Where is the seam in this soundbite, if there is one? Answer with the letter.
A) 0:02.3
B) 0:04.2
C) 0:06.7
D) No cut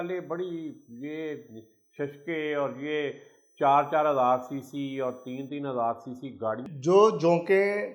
C